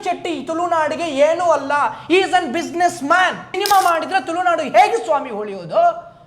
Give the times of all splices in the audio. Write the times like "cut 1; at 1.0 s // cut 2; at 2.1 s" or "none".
cut 1; at 3.6 s